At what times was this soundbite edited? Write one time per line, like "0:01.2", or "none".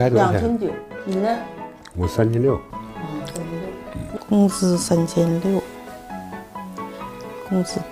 0:04.1